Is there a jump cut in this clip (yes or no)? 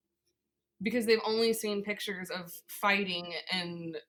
no